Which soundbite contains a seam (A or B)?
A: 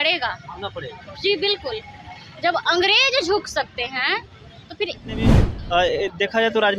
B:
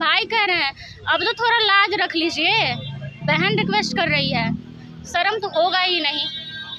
A